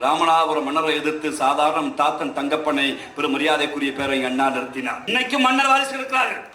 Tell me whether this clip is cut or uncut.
cut